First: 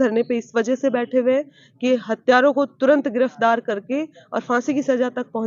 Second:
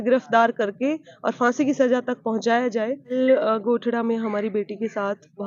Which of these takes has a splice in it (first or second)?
second